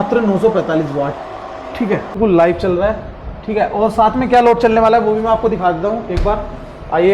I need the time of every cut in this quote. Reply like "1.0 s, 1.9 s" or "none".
2.1 s